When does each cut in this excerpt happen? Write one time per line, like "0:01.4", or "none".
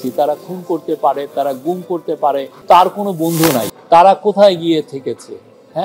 0:02.5
0:03.6